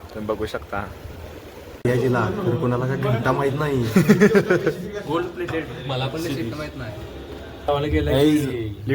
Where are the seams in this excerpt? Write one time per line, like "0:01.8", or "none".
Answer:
0:01.8
0:07.7